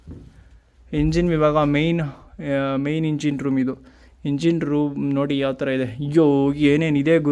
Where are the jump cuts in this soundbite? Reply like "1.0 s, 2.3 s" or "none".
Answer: none